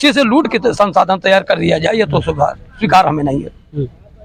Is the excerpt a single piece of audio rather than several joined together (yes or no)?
yes